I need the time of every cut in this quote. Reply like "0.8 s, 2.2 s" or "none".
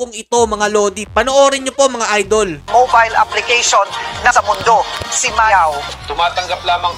5.9 s